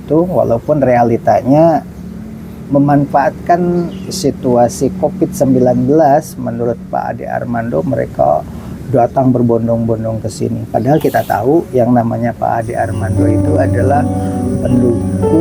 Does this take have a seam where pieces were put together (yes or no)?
no